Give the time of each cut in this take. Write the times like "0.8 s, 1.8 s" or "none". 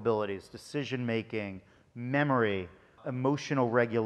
3.0 s

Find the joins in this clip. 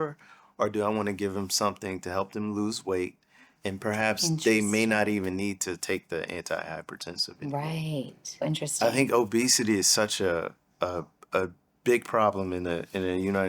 8.4 s, 11.7 s

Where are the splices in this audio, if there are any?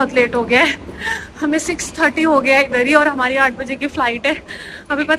none

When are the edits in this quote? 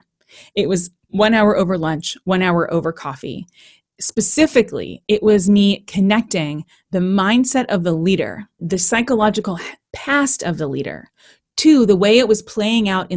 8.6 s

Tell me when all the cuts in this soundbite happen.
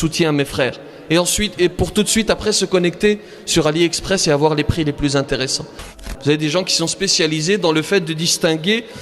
5.9 s

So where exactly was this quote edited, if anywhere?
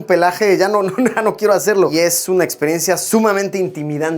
1.9 s

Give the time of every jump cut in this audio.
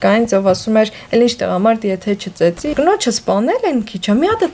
2.7 s

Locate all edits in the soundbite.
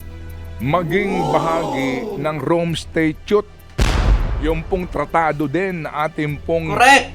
none

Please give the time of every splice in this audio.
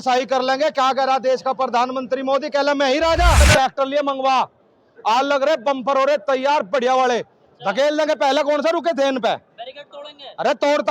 3.4 s

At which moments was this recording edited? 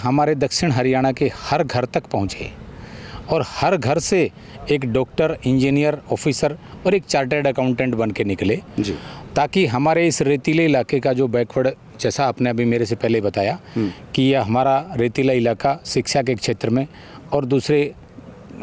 none

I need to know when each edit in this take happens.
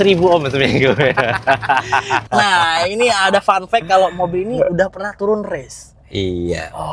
2.3 s

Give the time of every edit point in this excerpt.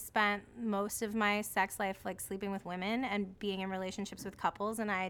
none

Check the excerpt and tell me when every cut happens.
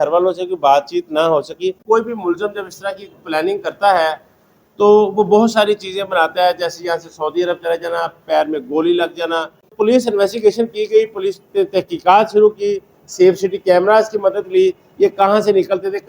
1.8 s, 9.7 s

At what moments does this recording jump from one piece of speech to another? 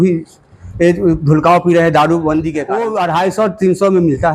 2.7 s

